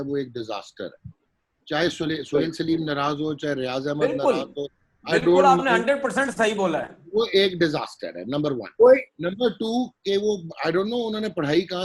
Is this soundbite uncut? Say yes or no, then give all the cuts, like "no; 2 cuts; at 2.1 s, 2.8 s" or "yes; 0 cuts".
yes; 0 cuts